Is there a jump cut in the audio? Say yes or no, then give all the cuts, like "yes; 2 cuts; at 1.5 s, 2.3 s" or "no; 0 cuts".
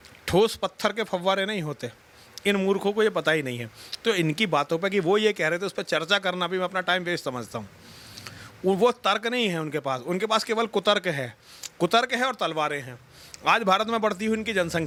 no; 0 cuts